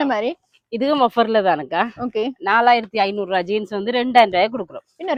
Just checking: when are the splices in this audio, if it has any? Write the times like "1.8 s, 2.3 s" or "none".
none